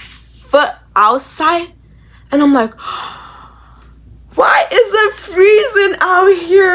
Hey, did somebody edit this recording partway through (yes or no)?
no